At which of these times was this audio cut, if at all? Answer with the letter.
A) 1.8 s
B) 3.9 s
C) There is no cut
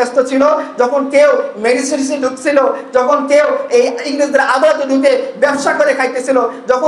C